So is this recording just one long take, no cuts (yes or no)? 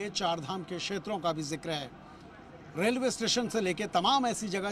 no